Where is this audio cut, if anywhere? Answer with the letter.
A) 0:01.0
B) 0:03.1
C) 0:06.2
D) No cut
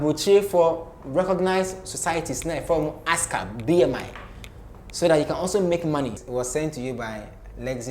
C